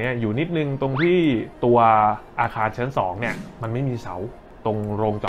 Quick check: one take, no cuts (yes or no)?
no